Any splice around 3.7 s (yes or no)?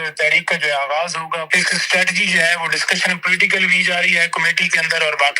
no